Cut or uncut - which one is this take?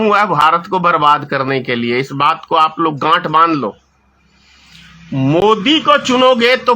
uncut